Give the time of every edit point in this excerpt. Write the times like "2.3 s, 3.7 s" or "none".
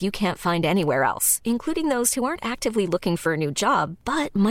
none